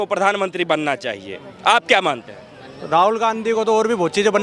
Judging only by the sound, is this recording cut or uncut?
uncut